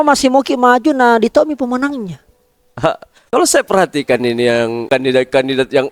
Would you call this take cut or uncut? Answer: cut